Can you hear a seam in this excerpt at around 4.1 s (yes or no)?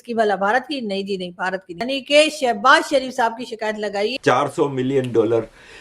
yes